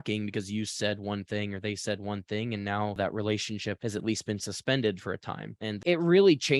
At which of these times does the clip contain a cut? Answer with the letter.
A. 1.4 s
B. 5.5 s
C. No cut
B